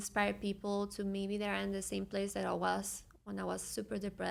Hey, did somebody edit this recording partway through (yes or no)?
no